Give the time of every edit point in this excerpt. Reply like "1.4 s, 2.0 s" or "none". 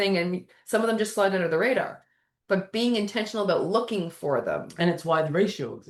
none